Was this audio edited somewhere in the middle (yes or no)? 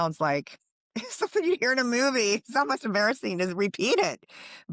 no